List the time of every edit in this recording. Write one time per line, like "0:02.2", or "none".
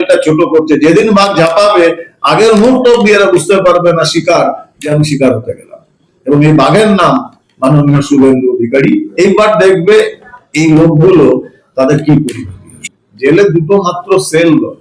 0:12.9